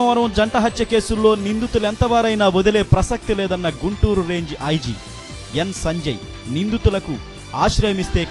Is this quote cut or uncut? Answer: uncut